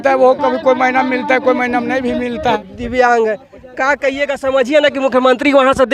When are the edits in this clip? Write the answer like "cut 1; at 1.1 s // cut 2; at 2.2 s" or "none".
cut 1; at 2.6 s